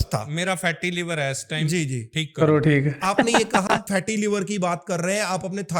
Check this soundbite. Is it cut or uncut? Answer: cut